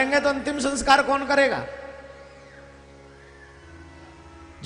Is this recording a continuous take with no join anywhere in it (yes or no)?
yes